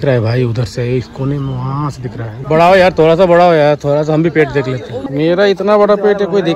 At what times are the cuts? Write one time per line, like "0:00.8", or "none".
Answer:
0:02.3
0:05.0